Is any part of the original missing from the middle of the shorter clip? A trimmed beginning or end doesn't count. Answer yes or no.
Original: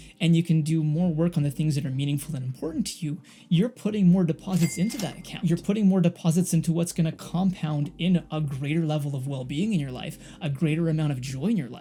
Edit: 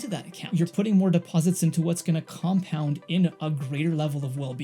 no